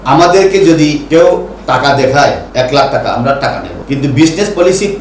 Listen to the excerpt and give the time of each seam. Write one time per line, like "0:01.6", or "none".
0:01.0
0:02.4
0:03.7

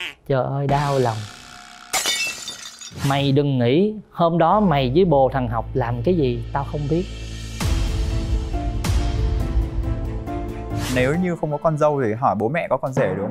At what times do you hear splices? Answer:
0:02.9
0:10.9

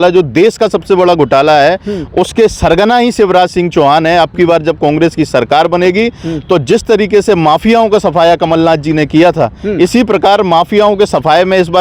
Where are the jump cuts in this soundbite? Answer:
none

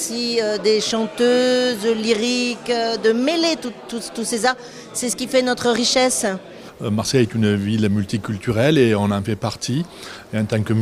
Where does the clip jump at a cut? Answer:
0:05.4

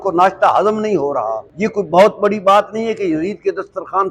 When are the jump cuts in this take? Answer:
none

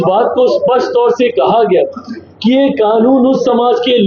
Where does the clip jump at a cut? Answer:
none

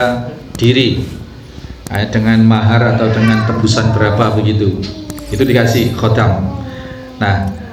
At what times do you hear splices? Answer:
none

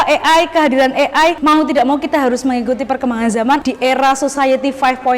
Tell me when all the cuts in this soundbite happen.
0:01.4
0:03.6

